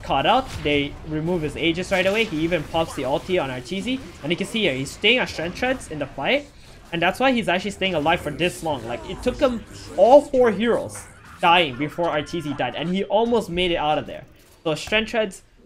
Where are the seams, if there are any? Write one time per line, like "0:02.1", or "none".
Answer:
0:05.5